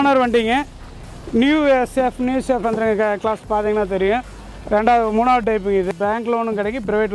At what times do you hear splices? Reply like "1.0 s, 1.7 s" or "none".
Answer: 5.9 s